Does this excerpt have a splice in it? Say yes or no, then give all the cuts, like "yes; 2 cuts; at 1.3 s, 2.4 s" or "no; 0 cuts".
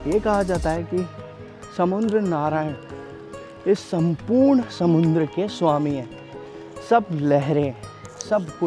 no; 0 cuts